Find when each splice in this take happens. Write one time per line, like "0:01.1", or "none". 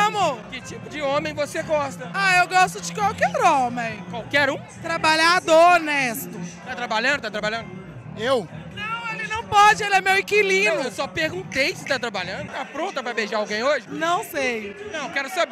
none